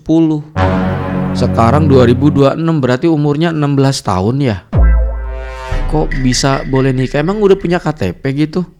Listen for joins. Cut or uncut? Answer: uncut